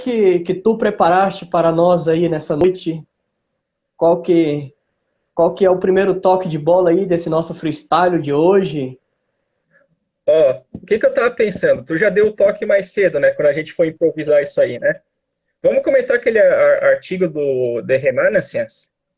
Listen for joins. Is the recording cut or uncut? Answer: cut